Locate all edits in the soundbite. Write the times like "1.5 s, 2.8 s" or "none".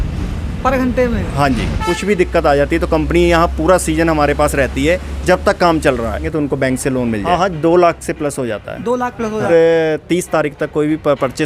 1.8 s, 6.3 s, 7.2 s, 9.5 s